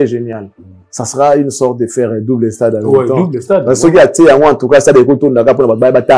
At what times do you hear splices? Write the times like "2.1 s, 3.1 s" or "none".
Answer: none